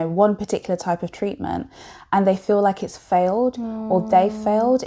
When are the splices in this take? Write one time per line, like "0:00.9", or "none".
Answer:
none